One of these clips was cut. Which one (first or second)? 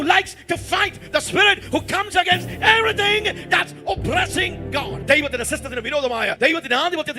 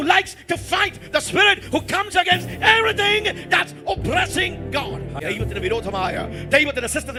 first